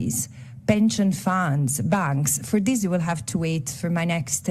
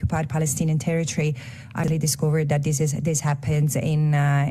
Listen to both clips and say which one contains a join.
second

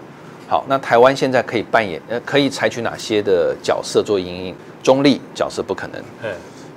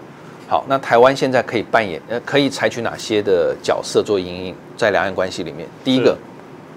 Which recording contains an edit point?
first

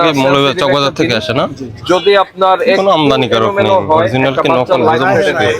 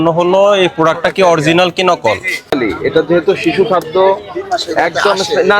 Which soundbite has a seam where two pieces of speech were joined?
second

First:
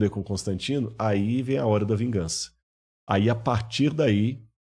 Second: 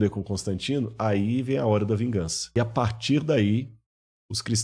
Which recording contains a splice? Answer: second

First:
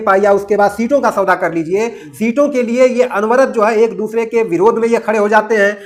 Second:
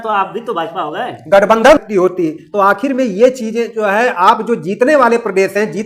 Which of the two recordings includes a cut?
second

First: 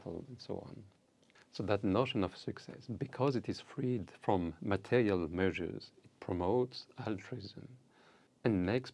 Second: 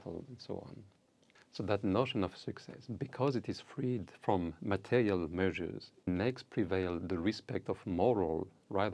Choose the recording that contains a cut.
second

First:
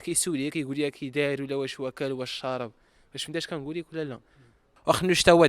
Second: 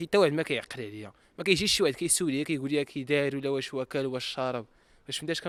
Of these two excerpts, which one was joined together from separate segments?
first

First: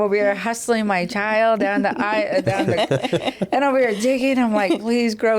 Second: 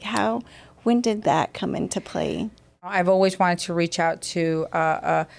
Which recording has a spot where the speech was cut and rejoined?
second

